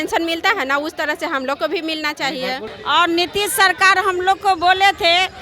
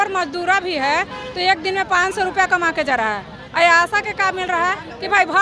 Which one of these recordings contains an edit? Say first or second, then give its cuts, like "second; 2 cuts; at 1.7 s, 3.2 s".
first; 1 cut; at 2.7 s